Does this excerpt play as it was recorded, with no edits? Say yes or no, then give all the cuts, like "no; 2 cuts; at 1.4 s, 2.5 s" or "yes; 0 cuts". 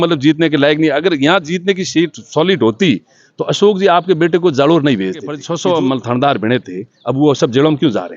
no; 1 cut; at 5.4 s